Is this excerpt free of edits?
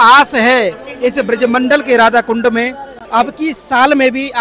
no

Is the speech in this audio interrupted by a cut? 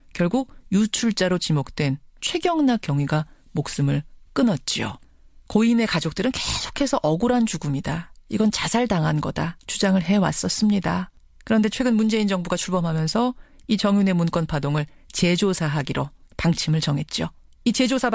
no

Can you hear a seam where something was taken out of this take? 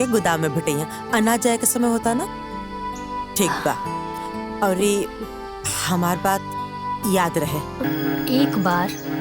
yes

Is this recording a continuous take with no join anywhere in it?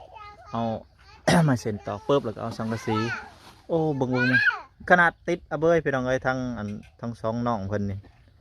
no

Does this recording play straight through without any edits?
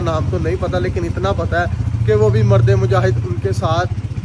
yes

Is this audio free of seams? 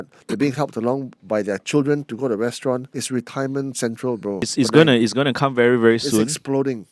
no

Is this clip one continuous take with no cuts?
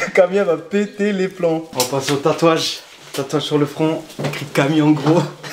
yes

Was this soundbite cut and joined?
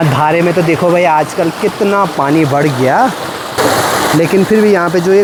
no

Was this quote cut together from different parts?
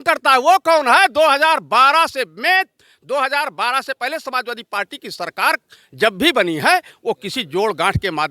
no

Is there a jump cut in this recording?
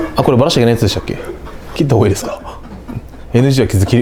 no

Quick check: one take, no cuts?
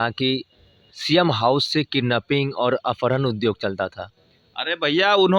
yes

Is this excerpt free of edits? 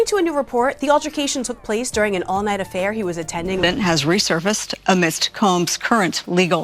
no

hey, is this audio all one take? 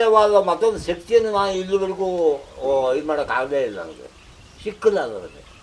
yes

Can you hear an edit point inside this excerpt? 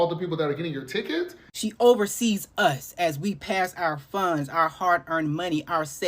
yes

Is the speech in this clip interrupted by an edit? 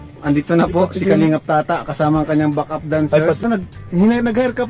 yes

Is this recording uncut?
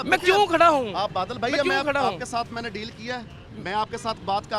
yes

